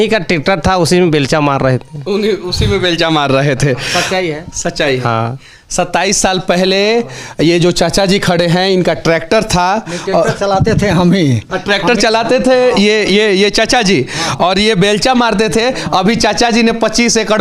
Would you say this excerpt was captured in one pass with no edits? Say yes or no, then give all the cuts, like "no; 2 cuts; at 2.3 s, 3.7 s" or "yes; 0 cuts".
yes; 0 cuts